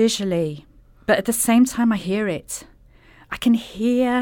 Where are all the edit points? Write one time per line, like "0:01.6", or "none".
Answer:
none